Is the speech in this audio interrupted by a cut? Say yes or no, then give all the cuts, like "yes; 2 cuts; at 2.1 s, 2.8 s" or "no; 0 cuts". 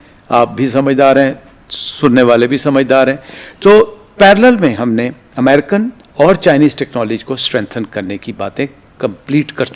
no; 0 cuts